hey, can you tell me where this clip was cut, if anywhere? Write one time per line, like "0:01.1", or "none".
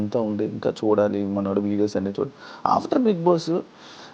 none